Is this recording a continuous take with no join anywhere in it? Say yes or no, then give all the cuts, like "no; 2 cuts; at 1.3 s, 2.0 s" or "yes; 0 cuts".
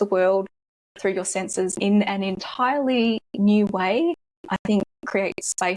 no; 1 cut; at 1.7 s